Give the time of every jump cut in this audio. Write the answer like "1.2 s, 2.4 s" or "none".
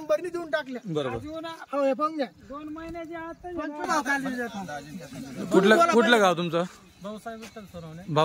3.8 s